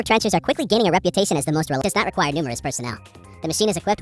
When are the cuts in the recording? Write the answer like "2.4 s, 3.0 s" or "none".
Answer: 1.8 s